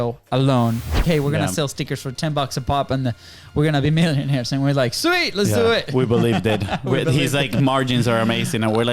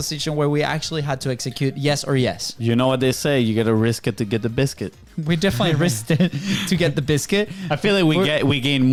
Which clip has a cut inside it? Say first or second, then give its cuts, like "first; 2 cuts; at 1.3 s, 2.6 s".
first; 1 cut; at 1.0 s